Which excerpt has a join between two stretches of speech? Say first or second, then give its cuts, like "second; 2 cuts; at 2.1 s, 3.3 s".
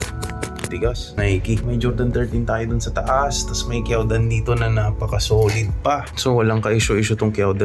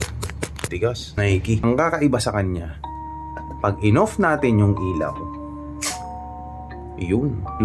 second; 1 cut; at 1.6 s